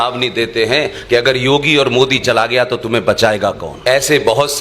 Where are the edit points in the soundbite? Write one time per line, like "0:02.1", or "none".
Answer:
0:03.7